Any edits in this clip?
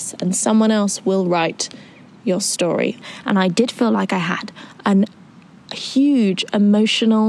yes; 1 cut; at 3.0 s

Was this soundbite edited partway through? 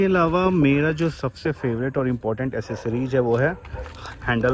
no; 0 cuts

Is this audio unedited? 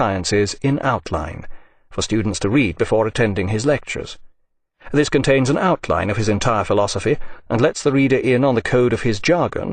no; 1 cut; at 3.6 s

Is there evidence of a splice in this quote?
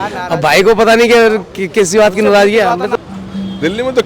yes; 1 cut; at 2.9 s

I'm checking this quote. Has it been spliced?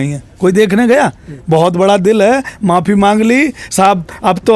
no; 0 cuts

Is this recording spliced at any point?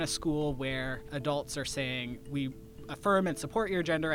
yes; 1 cut; at 1.1 s

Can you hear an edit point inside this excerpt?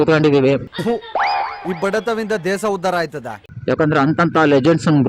yes; 1 cut; at 3.3 s

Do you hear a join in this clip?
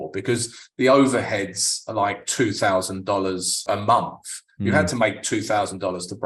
yes; 1 cut; at 3.6 s

